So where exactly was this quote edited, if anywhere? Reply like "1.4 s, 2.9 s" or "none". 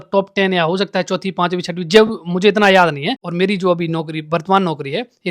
3.2 s